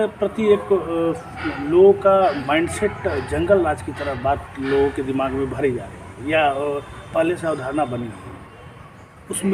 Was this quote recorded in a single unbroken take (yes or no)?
yes